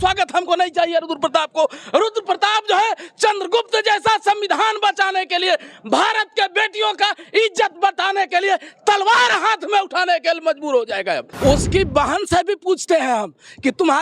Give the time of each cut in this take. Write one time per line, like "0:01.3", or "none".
0:11.3

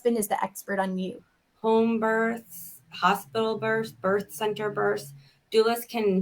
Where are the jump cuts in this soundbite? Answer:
0:01.2

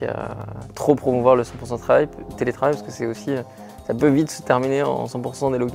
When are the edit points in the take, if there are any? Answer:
none

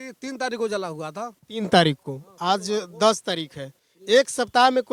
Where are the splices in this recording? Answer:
none

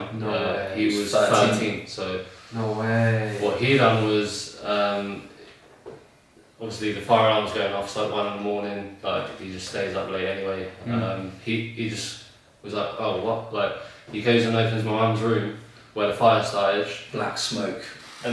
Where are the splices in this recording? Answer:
none

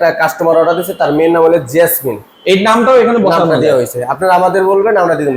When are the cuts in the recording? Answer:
none

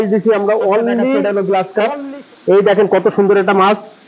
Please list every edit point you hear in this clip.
0:01.3

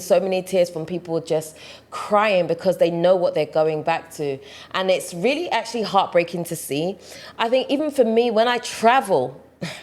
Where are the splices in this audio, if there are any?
none

